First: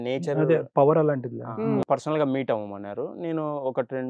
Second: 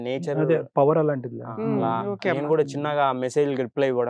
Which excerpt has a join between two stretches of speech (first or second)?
first